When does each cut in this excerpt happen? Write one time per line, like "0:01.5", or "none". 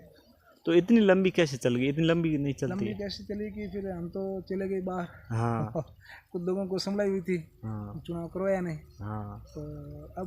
none